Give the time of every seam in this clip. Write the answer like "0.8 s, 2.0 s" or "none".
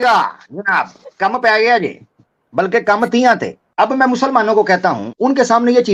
3.6 s, 5.1 s